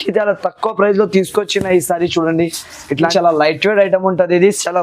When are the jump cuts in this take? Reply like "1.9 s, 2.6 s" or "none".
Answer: 3.0 s